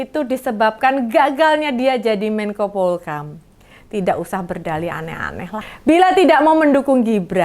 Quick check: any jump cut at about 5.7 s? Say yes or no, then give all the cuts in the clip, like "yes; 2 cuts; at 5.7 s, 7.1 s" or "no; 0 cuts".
yes; 1 cut; at 5.7 s